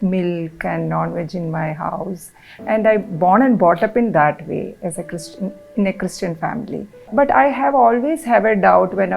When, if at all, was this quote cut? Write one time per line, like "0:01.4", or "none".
0:07.1